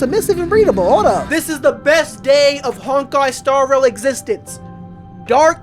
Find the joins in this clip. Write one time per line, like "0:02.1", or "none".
0:01.2